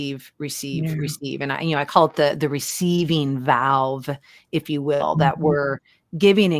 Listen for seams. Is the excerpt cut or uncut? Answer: uncut